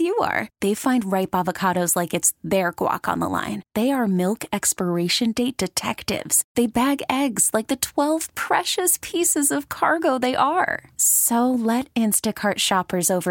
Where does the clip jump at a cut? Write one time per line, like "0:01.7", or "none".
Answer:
none